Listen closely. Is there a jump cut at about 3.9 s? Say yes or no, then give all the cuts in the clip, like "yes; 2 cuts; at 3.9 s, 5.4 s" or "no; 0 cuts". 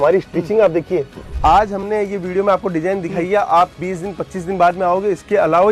no; 1 cut; at 1.2 s